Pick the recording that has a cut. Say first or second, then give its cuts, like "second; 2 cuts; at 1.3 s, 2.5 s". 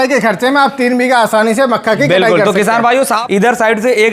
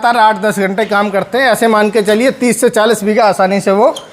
first; 1 cut; at 3.2 s